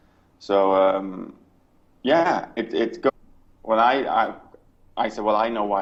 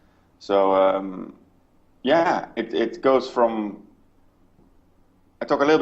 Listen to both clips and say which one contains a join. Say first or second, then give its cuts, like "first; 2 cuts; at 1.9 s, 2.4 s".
second; 1 cut; at 3.1 s